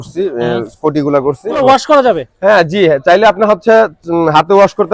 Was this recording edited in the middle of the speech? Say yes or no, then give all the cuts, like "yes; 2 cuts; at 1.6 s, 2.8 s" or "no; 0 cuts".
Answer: yes; 1 cut; at 1.6 s